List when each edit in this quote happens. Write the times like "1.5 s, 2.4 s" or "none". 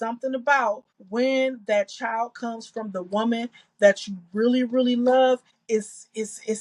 0.9 s, 5.5 s